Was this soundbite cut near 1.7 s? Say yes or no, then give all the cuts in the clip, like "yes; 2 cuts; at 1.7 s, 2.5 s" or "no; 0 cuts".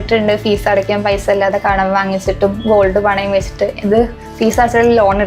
no; 0 cuts